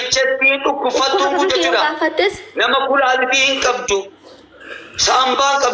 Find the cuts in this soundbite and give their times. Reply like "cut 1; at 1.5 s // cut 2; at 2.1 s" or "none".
none